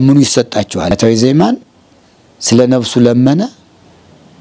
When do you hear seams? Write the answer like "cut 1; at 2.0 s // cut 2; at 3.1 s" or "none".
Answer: cut 1; at 0.9 s

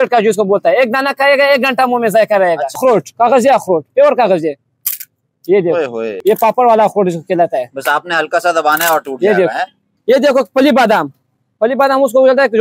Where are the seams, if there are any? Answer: cut 1; at 2.8 s // cut 2; at 6.1 s // cut 3; at 9.9 s

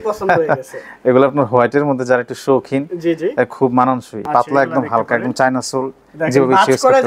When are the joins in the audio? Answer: cut 1; at 4.2 s

